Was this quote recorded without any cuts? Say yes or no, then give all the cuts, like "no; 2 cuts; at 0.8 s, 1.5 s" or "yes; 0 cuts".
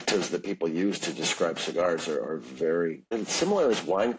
no; 1 cut; at 3.0 s